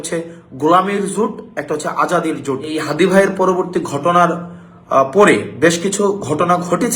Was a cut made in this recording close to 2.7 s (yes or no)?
yes